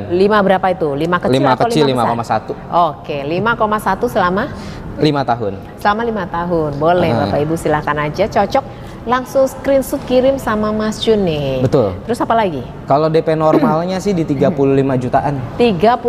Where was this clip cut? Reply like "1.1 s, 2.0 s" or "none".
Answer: none